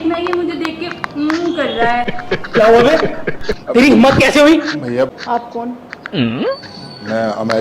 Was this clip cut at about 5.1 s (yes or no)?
yes